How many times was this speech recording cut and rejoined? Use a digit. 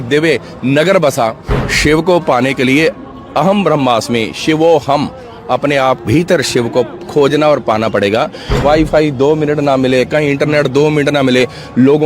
2